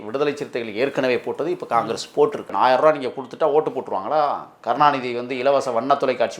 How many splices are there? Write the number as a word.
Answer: one